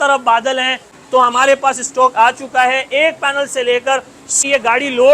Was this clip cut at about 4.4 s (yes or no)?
yes